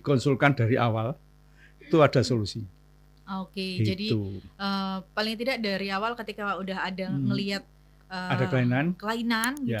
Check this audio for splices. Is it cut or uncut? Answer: uncut